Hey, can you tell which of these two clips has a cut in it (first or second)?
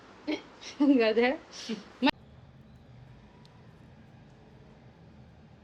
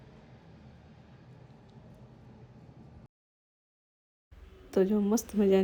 first